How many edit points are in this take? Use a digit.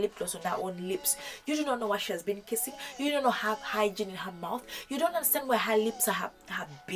0